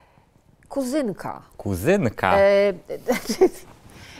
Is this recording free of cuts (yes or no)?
yes